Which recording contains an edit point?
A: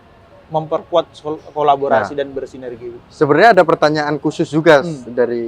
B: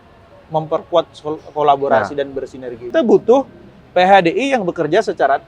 B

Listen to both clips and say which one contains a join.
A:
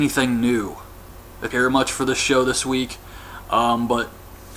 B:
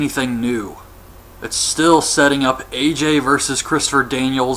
B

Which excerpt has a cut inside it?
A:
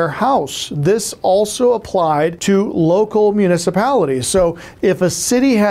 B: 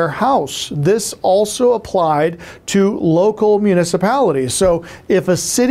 A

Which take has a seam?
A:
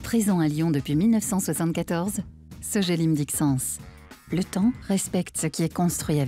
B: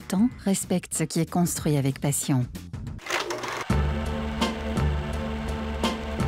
B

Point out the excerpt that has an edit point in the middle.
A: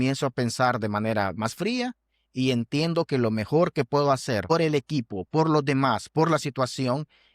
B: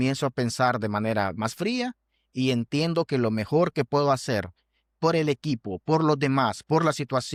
A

